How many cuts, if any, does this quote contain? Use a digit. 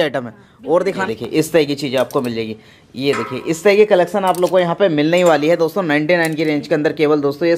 1